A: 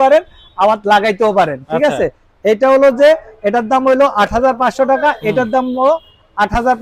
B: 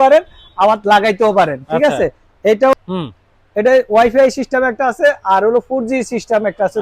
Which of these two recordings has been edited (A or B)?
B